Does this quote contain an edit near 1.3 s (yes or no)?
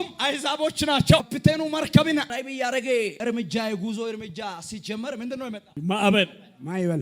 yes